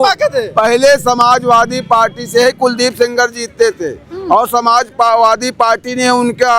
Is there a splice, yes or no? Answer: no